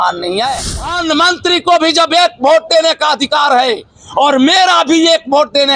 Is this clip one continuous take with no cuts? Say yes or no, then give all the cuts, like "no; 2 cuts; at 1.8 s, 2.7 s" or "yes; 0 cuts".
no; 1 cut; at 1.0 s